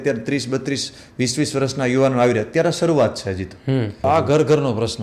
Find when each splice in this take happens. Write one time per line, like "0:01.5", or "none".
0:04.0